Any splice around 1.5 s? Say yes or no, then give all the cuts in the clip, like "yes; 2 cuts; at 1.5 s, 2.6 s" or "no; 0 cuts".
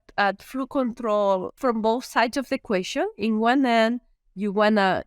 yes; 1 cut; at 1.5 s